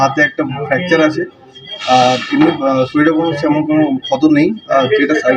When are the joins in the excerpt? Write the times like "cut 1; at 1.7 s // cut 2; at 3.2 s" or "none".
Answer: none